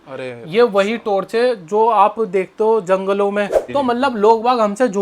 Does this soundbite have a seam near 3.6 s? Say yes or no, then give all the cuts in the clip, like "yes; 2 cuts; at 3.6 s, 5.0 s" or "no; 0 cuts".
yes; 1 cut; at 3.6 s